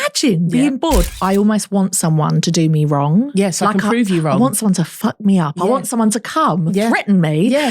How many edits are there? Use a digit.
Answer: 1